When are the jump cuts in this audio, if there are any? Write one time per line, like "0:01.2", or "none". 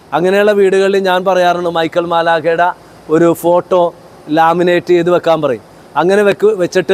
none

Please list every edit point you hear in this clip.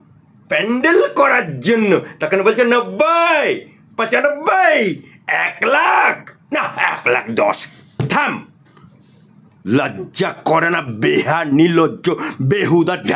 none

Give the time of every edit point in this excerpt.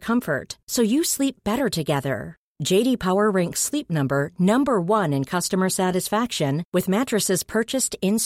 none

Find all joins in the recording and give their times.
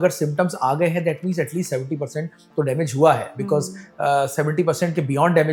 none

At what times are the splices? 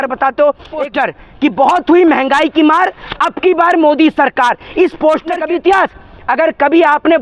0:00.9
0:05.4

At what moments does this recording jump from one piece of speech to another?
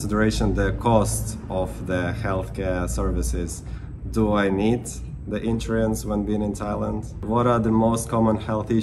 0:07.1

